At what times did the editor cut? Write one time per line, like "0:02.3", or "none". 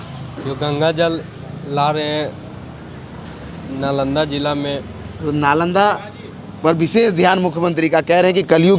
none